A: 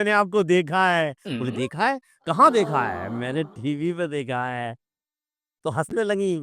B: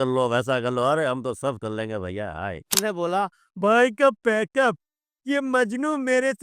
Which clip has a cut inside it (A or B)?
B